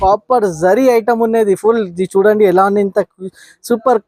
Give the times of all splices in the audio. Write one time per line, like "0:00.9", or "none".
none